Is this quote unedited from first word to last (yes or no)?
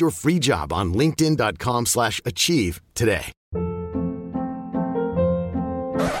no